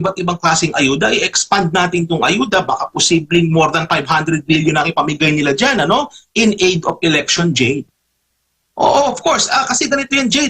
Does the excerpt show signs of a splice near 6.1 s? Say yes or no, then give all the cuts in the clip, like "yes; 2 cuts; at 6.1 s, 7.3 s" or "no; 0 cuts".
no; 1 cut; at 7.9 s